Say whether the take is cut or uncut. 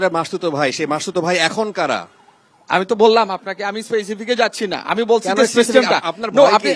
uncut